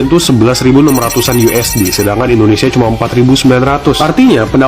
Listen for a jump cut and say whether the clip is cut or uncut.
uncut